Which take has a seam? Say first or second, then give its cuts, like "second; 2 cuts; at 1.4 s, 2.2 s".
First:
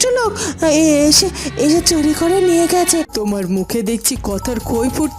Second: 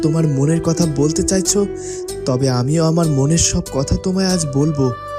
first; 1 cut; at 3.1 s